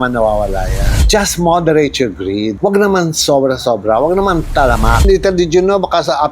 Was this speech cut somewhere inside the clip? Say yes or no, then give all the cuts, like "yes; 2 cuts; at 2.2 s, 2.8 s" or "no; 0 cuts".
yes; 2 cuts; at 1.0 s, 5.0 s